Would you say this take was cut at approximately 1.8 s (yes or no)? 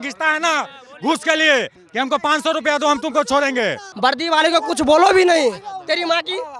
no